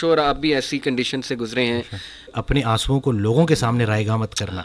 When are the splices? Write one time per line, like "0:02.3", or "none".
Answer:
0:02.4